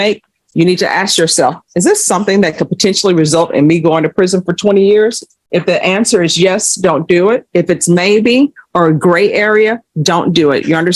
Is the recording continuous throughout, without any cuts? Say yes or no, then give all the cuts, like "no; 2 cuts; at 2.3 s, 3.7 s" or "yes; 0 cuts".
yes; 0 cuts